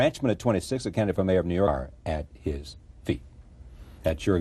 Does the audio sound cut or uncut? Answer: uncut